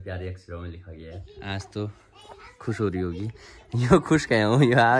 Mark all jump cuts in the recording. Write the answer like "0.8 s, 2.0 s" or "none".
1.2 s